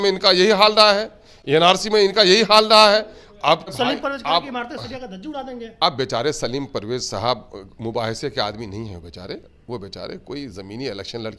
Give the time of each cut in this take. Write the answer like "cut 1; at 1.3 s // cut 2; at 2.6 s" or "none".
cut 1; at 3.7 s